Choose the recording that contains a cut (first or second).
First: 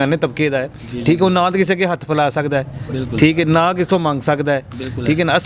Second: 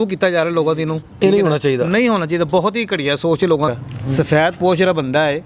second